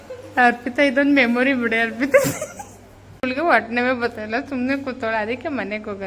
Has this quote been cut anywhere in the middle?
yes; 1 cut; at 3.1 s

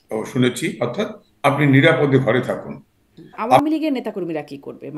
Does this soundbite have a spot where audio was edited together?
yes; 1 cut; at 3.6 s

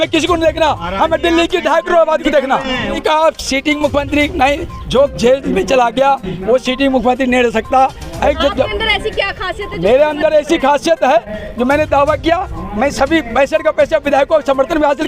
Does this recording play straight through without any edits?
no; 2 cuts; at 3.0 s, 8.1 s

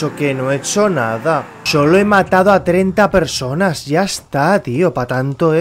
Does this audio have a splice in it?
yes; 1 cut; at 1.6 s

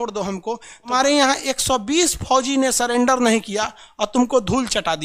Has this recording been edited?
yes; 1 cut; at 0.9 s

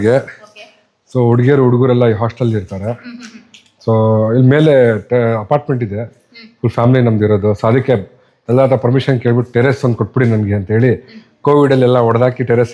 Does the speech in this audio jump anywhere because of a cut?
no; 0 cuts

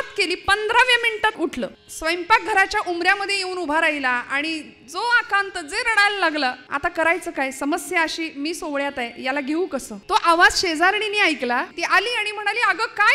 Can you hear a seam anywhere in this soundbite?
yes; 4 cuts; at 1.4 s, 6.7 s, 9.9 s, 11.7 s

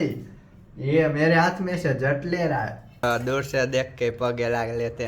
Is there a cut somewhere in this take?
yes; 1 cut; at 3.0 s

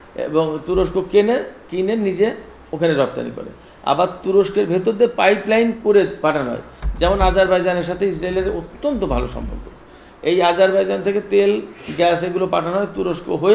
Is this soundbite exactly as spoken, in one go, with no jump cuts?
yes; 0 cuts

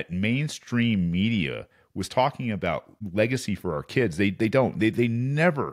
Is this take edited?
yes; 1 cut; at 3.0 s

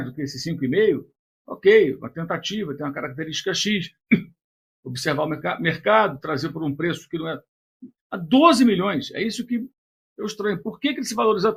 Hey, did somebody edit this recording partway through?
no; 0 cuts

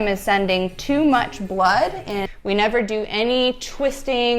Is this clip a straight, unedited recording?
no; 1 cut; at 2.3 s

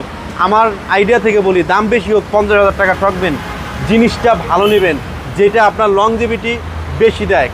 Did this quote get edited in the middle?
no; 0 cuts

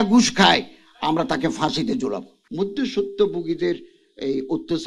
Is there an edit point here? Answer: yes; 1 cut; at 2.4 s

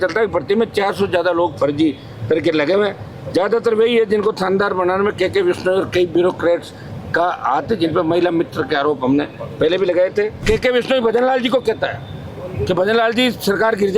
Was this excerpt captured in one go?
no; 1 cut; at 10.4 s

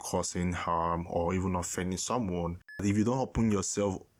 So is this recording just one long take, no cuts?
no; 1 cut; at 2.8 s

